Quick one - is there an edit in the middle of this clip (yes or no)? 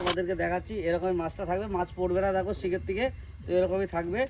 no